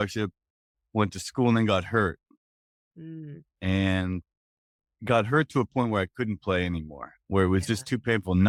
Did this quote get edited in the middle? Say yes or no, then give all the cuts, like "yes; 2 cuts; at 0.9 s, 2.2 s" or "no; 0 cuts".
no; 0 cuts